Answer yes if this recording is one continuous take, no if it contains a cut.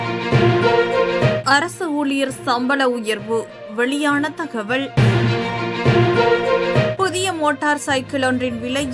no